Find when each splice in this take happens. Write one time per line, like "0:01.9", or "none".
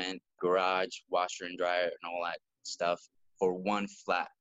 none

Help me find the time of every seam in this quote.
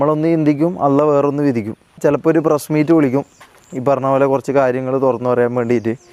0:02.0

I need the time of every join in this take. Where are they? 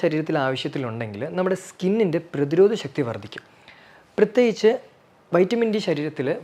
none

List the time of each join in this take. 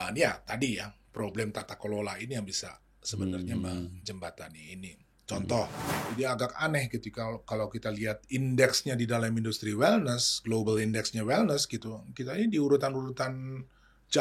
0:05.9

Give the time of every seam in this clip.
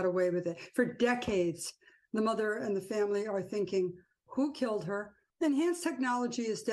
none

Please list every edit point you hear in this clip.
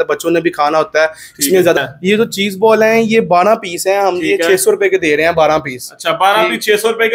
0:01.8

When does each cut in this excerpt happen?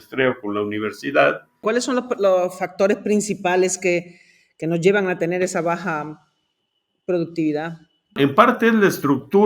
0:01.6
0:08.2

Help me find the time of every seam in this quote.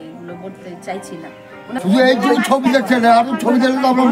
0:01.8

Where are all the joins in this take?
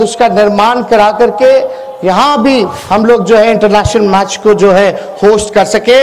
0:02.8

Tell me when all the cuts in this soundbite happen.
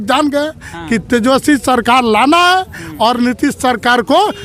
none

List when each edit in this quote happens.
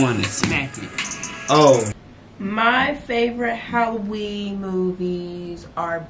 0:01.9

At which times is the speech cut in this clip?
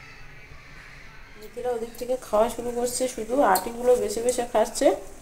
0:01.5

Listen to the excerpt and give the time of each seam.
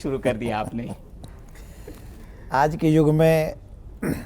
none

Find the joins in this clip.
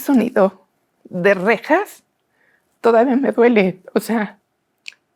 none

